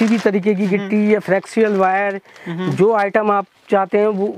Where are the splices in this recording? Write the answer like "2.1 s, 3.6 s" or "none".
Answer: none

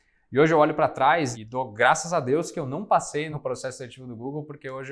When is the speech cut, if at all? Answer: 1.4 s, 3.3 s

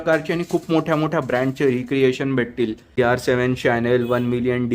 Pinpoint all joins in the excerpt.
2.9 s

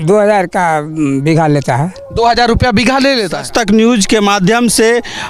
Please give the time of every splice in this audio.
3.4 s

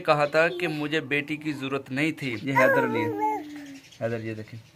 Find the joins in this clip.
2.3 s

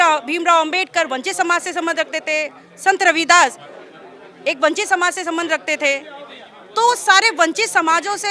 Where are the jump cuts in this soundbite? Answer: none

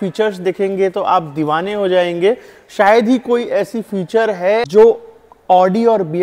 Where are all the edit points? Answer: 4.7 s

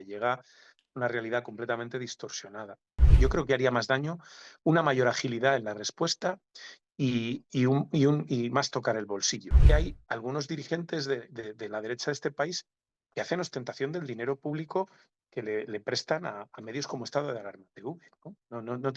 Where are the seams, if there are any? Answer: 3.2 s, 9.7 s

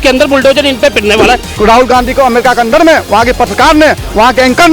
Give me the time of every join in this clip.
1.6 s

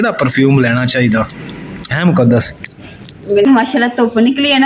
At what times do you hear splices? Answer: 3.5 s

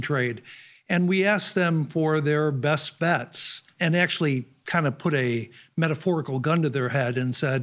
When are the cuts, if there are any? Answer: 3.6 s

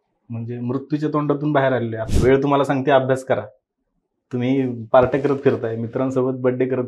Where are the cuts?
2.0 s

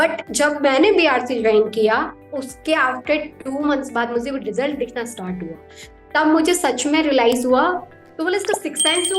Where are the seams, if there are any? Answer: 7.9 s

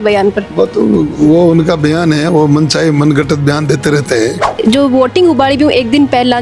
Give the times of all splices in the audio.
4.4 s

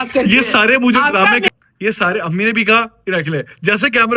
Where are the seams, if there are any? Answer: 1.5 s

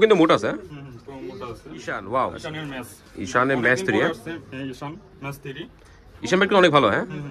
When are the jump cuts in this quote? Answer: 1.8 s

